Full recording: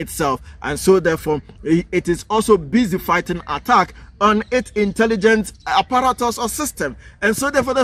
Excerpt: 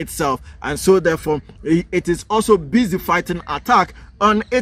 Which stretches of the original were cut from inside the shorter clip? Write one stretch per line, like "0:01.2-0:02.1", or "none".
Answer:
none